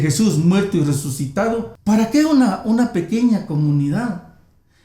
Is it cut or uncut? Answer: cut